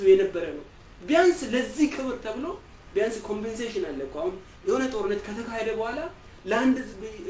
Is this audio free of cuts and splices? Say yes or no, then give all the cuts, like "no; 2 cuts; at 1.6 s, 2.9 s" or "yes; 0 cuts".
yes; 0 cuts